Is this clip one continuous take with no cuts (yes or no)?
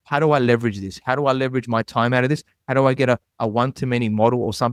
yes